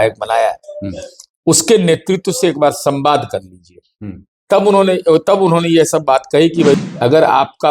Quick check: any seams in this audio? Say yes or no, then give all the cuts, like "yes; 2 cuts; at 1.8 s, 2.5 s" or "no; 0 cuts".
yes; 1 cut; at 6.8 s